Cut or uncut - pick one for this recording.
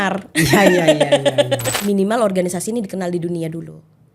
cut